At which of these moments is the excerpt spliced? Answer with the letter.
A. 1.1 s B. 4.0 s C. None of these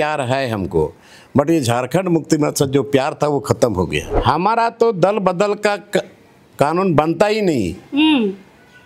B